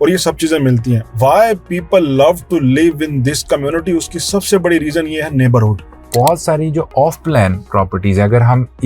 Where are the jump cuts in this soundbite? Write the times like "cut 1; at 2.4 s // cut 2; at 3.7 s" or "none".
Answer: cut 1; at 5.8 s